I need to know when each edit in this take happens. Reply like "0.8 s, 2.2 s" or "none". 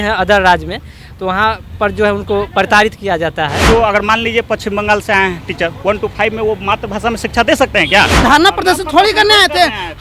3.7 s, 8.1 s